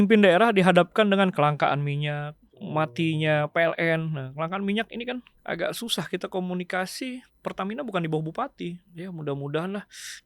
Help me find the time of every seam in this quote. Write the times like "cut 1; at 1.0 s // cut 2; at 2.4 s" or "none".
cut 1; at 2.7 s // cut 2; at 5.3 s // cut 3; at 7.3 s // cut 4; at 8.9 s